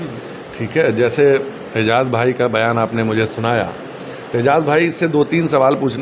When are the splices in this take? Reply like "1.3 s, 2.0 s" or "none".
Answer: none